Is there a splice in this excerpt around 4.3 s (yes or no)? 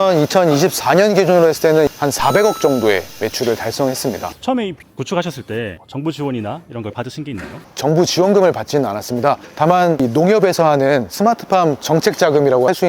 yes